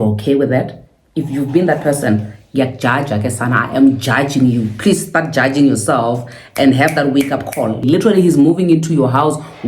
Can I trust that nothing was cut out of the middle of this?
no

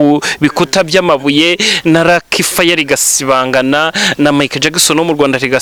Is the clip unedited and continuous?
yes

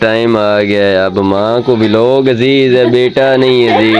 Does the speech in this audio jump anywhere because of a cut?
no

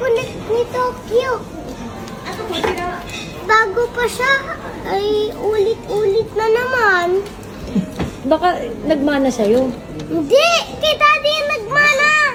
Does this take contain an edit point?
no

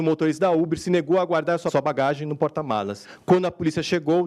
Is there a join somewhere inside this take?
yes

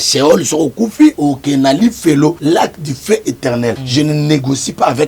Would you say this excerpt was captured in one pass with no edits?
no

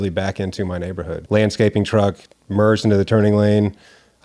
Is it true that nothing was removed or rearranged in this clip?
no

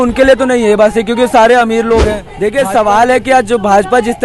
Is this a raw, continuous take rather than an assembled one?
no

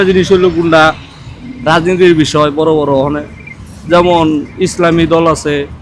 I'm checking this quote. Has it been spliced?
no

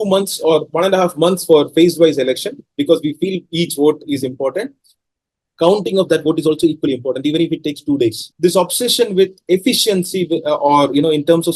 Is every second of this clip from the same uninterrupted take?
no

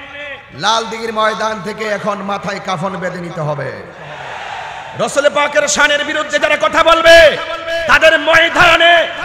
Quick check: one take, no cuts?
yes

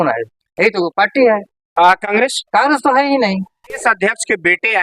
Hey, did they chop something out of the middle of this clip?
yes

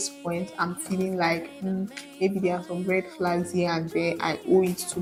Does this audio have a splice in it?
no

